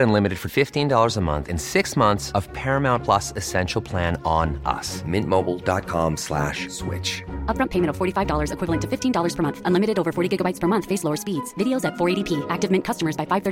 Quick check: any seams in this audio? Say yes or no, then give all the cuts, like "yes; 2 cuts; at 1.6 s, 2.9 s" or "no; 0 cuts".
no; 0 cuts